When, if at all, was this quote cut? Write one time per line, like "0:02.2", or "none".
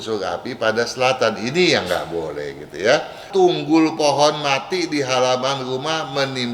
0:03.2